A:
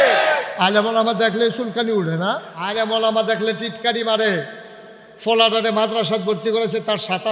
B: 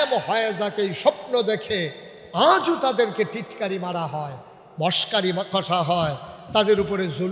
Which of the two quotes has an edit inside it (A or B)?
A